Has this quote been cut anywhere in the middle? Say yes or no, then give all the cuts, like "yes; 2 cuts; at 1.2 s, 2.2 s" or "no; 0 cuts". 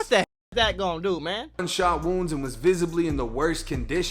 yes; 1 cut; at 1.7 s